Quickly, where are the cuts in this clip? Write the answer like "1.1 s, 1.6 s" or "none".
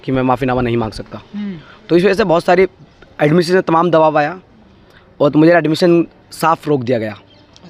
none

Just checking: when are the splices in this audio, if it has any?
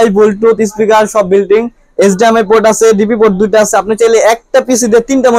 none

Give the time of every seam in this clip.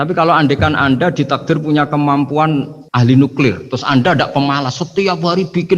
2.8 s

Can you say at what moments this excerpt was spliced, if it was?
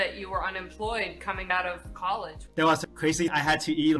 3.0 s

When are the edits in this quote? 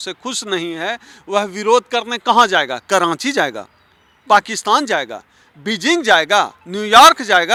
none

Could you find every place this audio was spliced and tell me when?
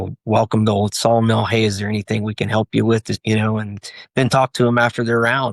3.2 s

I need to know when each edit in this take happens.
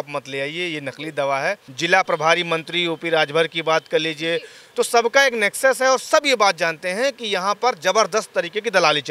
1.7 s, 4.6 s

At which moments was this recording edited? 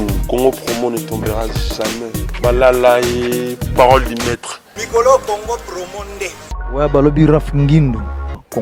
none

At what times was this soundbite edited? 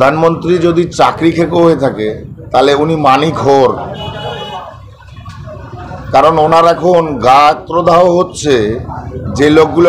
none

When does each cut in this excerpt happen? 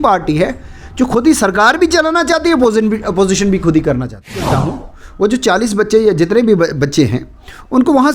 4.6 s

